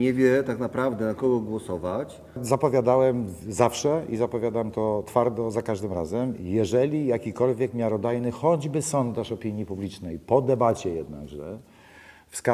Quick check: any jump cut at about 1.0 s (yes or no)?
no